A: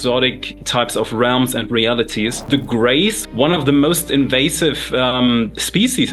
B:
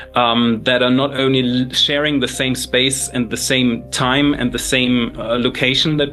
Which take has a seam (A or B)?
A